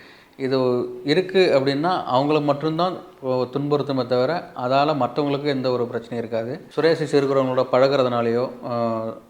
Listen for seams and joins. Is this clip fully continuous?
yes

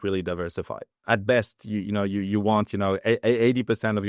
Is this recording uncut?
no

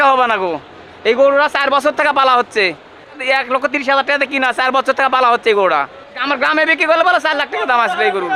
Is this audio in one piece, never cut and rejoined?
no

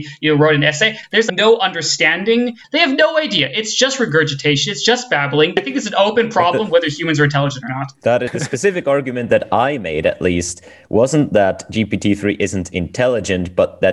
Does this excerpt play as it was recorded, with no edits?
no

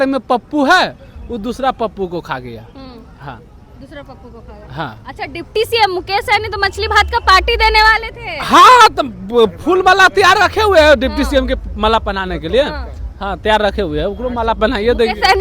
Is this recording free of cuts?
yes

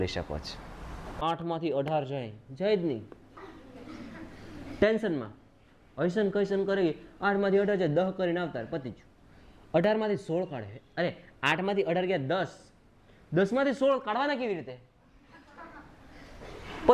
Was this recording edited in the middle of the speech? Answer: yes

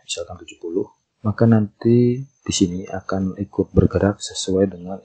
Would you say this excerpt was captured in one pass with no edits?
no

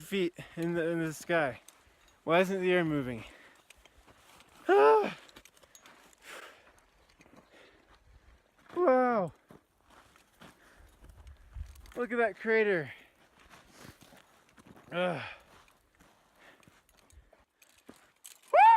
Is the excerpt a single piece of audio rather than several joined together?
no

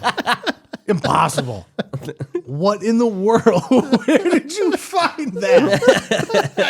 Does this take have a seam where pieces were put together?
yes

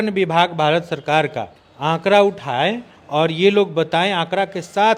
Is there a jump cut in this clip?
no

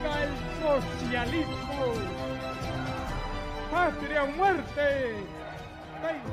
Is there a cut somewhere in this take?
no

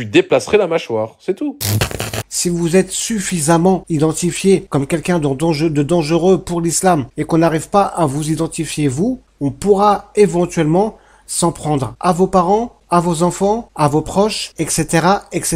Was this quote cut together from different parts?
yes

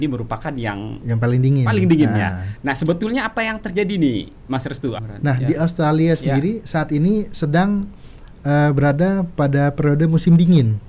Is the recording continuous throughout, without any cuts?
no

